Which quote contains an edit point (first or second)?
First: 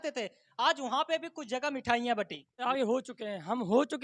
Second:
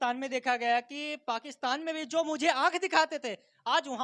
first